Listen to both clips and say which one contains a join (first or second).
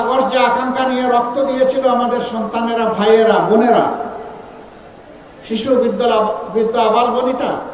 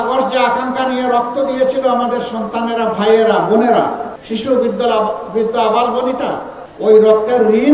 second